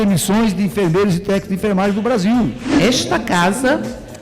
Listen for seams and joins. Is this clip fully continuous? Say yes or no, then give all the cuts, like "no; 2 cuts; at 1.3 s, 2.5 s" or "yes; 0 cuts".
no; 1 cut; at 2.7 s